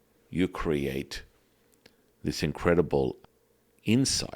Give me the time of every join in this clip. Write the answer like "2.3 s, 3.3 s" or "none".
3.2 s